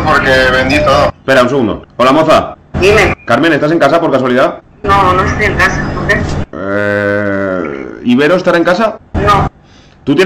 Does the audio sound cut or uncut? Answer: cut